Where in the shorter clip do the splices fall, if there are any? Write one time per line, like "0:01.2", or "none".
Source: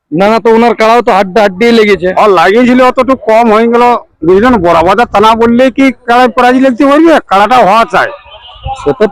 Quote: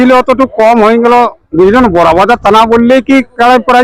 none